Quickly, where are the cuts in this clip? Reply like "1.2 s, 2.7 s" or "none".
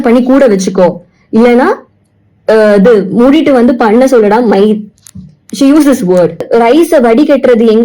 6.5 s

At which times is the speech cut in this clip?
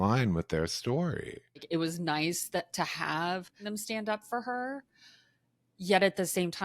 1.6 s, 3.6 s

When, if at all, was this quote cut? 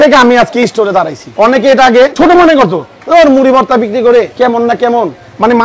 1.2 s, 2.1 s, 4.3 s

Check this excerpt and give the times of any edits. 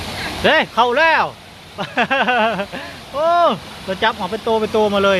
none

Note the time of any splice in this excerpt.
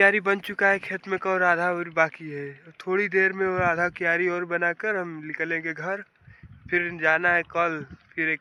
none

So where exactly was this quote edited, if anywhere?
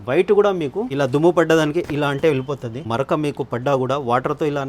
0.9 s, 2.9 s

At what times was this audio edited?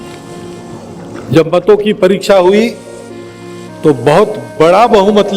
1.1 s

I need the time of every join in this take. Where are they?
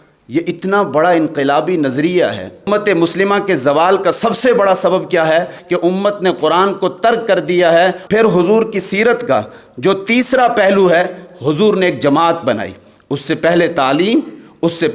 2.7 s, 5.6 s, 8.0 s

